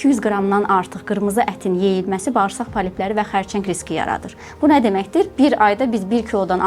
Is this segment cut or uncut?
uncut